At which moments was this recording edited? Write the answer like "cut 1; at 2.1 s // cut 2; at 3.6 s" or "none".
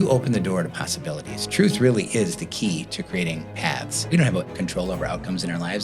cut 1; at 4.1 s